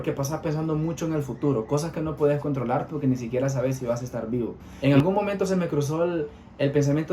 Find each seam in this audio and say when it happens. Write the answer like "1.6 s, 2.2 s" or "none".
4.6 s